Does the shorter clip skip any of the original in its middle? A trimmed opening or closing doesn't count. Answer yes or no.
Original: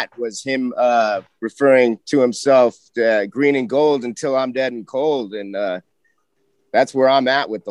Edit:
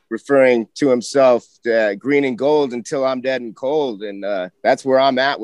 yes